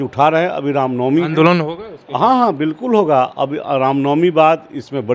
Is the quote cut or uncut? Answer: uncut